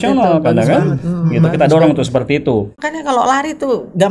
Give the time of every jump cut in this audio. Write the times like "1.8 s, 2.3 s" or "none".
2.8 s